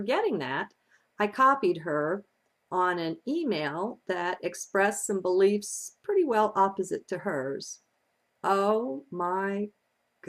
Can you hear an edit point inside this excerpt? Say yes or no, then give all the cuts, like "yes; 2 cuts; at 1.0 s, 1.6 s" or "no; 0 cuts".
no; 0 cuts